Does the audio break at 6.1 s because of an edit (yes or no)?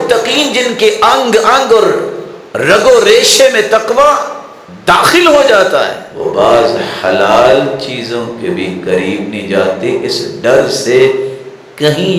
yes